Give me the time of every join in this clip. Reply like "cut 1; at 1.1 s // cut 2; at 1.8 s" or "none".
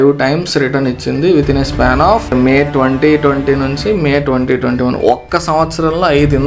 cut 1; at 2.3 s